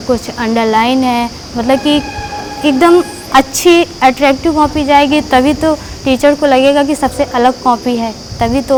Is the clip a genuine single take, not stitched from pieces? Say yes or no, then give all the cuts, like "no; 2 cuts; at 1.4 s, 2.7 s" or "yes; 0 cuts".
yes; 0 cuts